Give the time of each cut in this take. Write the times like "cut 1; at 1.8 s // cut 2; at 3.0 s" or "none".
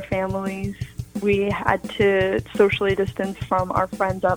none